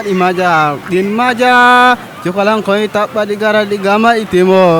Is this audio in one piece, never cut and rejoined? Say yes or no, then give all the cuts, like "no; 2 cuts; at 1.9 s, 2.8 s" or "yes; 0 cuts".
yes; 0 cuts